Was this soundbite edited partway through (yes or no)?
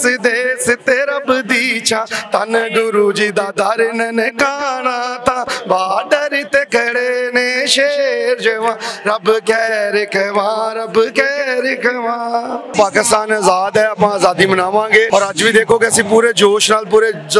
yes